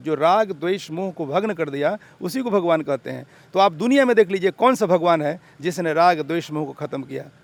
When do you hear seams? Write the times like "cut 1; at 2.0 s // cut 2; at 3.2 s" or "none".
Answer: none